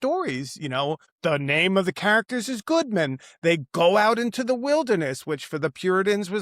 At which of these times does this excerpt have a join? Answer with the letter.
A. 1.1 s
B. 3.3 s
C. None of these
A